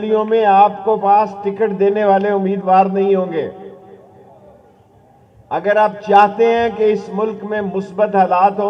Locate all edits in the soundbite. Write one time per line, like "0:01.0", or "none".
none

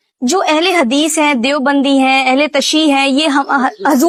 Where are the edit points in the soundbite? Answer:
none

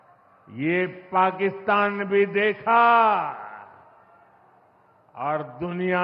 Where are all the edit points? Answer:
none

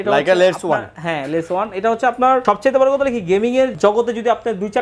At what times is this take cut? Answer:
0:02.4
0:03.7

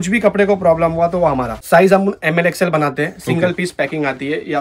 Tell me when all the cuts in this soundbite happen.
0:01.6

